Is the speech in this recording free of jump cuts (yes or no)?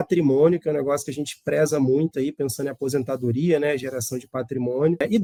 yes